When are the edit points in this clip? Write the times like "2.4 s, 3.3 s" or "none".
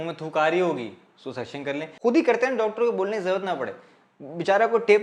1.9 s